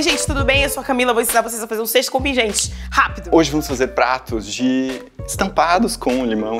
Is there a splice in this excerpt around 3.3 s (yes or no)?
yes